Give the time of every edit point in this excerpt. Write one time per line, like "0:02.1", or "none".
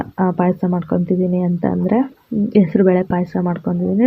none